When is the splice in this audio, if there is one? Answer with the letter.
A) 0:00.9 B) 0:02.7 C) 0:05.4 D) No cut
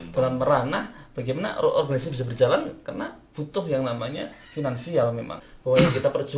C